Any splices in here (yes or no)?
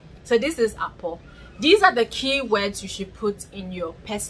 no